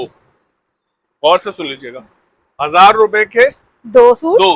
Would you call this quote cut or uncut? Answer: uncut